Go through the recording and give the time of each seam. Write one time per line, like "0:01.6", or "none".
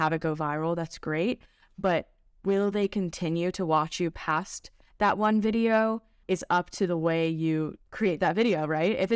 0:06.2
0:07.8